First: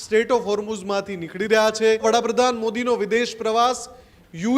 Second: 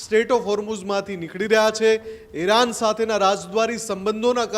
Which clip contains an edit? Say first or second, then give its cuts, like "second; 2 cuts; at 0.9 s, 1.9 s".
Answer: first; 1 cut; at 2.0 s